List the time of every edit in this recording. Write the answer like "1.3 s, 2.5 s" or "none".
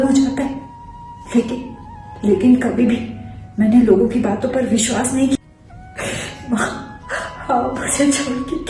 5.4 s